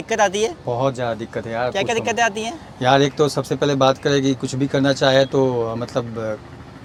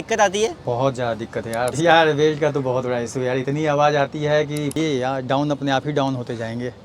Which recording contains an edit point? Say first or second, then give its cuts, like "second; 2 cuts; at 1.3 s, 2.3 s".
second; 2 cuts; at 1.7 s, 4.8 s